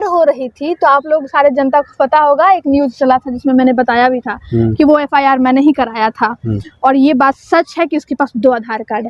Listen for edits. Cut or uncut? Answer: uncut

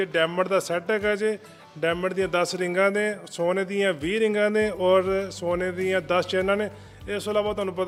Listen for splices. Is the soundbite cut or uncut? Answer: uncut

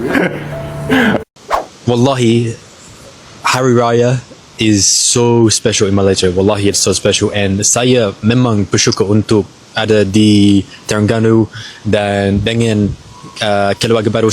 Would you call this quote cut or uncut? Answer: cut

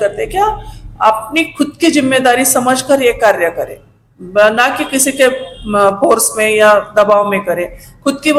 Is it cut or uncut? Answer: uncut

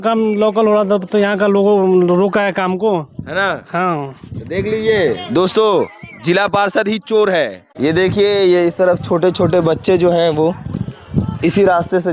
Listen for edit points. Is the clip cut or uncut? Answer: uncut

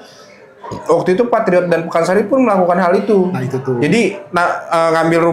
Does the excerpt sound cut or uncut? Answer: uncut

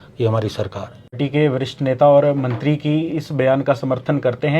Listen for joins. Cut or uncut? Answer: cut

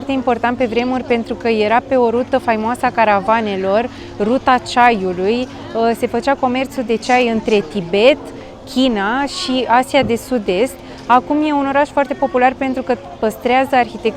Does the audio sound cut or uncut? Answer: uncut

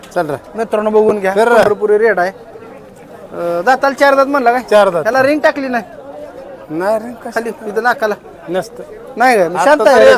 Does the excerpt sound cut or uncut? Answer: uncut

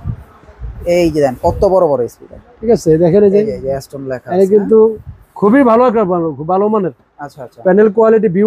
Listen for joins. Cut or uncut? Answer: uncut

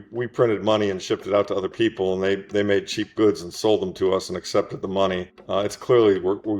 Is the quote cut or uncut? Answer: cut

